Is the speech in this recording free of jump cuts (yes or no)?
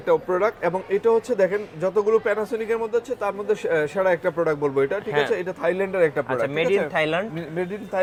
yes